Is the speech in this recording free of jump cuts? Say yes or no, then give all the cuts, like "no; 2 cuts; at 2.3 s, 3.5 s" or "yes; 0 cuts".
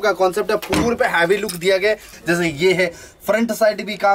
no; 1 cut; at 2.1 s